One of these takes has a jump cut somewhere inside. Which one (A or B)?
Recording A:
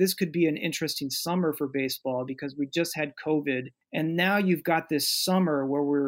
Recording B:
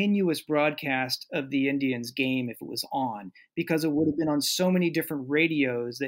A